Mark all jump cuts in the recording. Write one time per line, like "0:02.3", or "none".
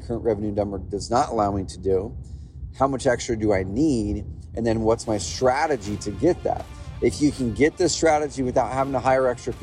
none